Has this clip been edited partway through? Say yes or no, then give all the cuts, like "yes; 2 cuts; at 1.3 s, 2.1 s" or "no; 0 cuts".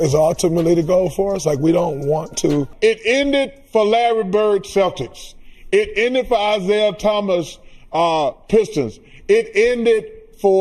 yes; 1 cut; at 2.7 s